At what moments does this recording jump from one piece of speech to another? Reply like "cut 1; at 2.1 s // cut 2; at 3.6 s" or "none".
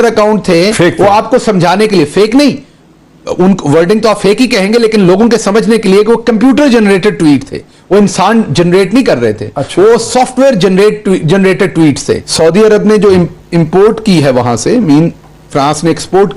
cut 1; at 12.3 s